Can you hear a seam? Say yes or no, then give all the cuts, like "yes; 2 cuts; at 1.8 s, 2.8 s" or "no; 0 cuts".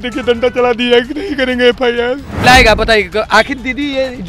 yes; 1 cut; at 2.4 s